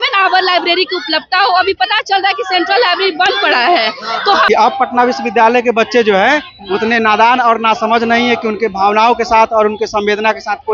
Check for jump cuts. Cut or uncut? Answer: cut